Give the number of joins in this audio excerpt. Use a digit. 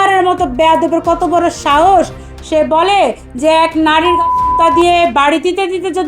0